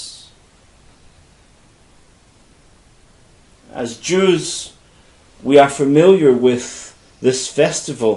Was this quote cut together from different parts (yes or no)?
yes